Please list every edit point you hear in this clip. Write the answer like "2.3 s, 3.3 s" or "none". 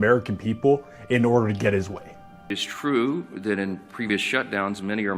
2.4 s